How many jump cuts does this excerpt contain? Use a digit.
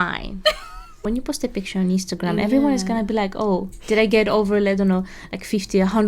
1